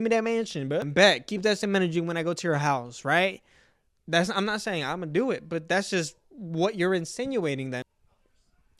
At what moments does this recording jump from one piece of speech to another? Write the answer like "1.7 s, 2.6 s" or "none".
0.9 s, 7.9 s